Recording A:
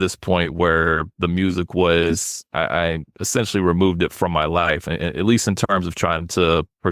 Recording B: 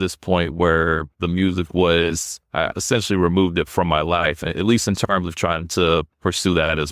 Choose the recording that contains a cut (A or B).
B